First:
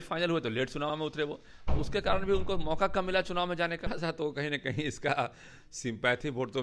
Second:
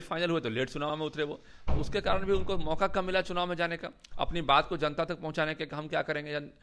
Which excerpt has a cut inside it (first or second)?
first